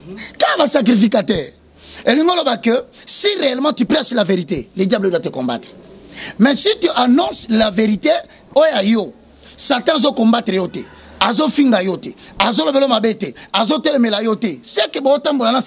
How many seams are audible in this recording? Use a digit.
0